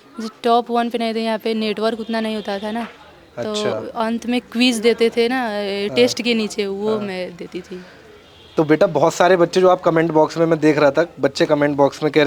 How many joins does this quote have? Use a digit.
0